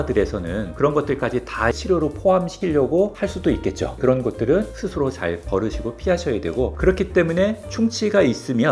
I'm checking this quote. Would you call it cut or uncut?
uncut